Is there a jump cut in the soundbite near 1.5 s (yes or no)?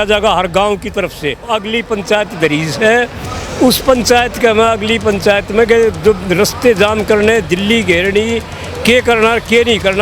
yes